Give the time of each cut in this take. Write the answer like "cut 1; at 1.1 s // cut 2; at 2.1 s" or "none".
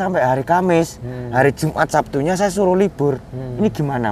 none